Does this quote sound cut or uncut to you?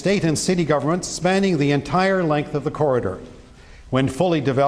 cut